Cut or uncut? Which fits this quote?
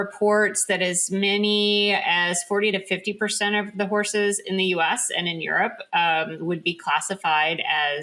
uncut